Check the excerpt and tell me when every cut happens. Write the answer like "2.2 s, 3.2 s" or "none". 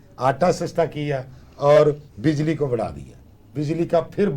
none